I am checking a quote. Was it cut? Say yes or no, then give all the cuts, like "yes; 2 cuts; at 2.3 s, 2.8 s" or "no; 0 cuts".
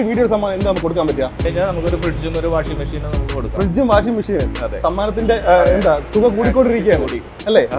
yes; 1 cut; at 1.4 s